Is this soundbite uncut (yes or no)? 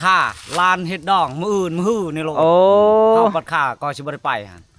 yes